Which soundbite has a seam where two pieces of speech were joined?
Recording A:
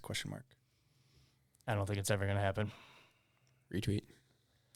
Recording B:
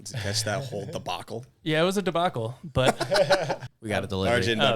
B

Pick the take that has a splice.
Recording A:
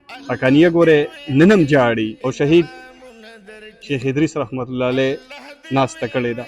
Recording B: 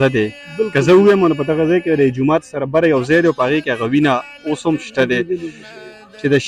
A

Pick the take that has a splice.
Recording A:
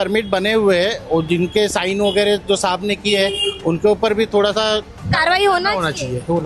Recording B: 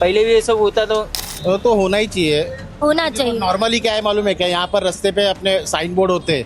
B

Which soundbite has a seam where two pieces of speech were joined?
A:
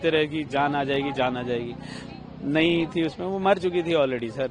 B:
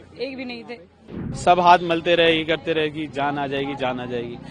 B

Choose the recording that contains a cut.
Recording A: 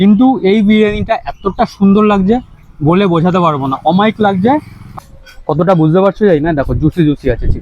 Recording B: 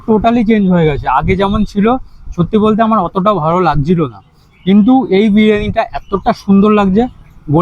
A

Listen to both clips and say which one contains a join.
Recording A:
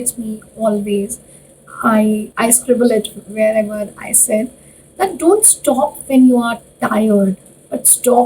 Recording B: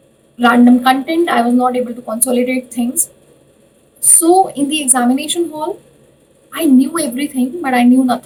A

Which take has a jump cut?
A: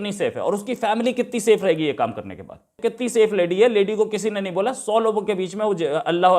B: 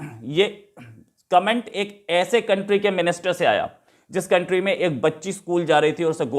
A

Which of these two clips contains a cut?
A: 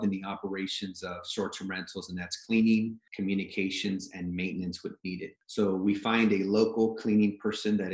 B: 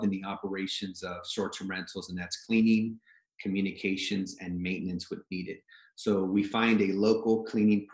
A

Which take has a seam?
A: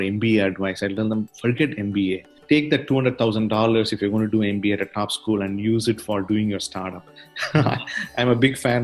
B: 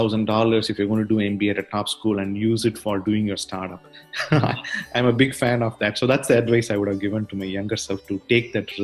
A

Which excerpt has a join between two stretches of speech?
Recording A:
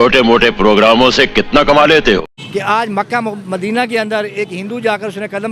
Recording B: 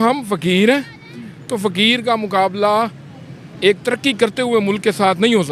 A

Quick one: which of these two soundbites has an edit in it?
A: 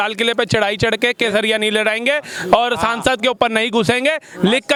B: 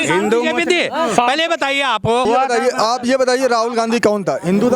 B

